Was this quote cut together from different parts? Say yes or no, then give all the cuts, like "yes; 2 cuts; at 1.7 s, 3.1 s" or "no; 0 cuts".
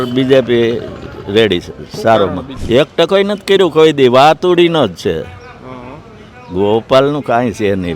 yes; 1 cut; at 2.5 s